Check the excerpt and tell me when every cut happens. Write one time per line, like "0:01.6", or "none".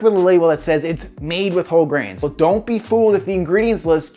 0:02.2